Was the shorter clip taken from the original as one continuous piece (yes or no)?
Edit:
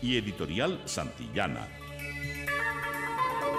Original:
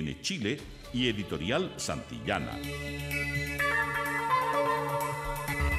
no